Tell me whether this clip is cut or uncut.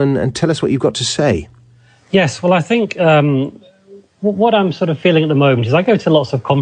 cut